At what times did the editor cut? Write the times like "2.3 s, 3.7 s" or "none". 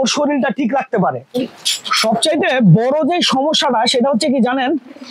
none